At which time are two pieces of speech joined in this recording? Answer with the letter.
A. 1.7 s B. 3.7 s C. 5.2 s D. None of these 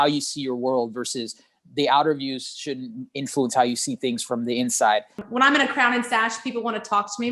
C